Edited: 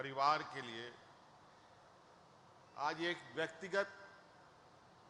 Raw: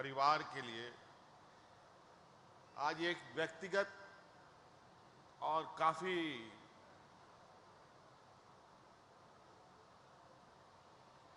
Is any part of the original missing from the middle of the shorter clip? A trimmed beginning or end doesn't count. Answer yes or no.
no